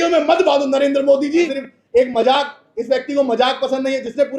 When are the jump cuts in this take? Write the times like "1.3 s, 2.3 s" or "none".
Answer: 1.6 s